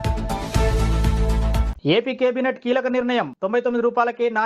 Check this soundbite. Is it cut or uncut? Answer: cut